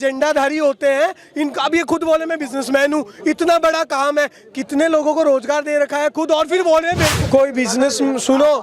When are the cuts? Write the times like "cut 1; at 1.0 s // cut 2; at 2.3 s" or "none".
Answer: cut 1; at 7.2 s